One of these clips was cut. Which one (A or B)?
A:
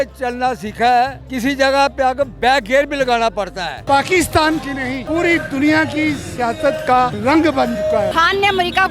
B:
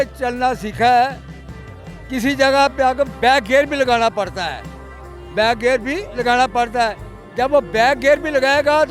A